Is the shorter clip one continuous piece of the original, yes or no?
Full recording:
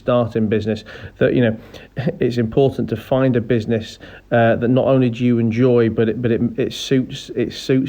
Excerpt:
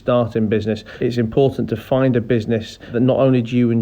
no